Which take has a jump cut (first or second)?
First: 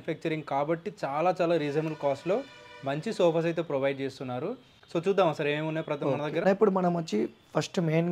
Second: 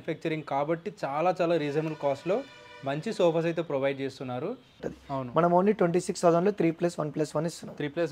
second